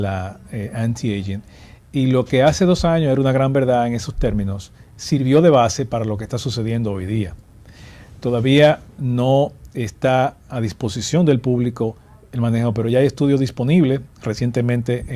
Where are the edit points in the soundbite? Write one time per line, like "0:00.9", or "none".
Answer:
0:08.3